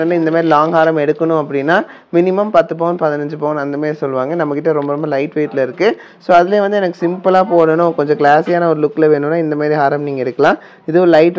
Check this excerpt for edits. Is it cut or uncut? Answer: uncut